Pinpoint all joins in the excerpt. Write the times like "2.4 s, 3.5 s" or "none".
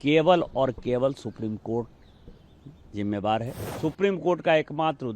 3.6 s